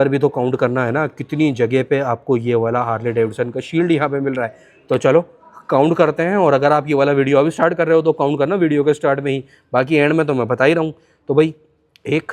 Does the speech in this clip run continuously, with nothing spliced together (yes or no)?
yes